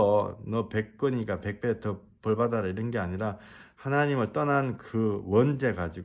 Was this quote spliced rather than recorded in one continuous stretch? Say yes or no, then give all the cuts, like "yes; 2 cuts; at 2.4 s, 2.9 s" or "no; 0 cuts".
no; 0 cuts